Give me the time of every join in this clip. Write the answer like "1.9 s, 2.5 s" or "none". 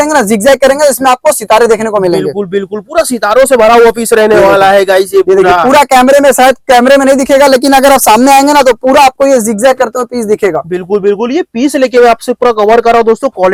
none